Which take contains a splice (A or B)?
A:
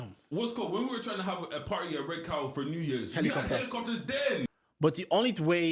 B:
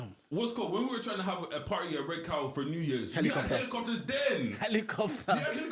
A